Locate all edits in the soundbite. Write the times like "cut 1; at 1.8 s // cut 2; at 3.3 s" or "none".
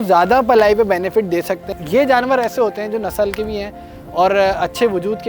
cut 1; at 1.7 s